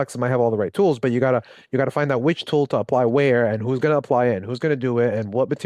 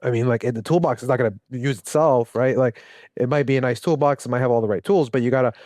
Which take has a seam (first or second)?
second